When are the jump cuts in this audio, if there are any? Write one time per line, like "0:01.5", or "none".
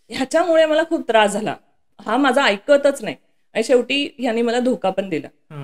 none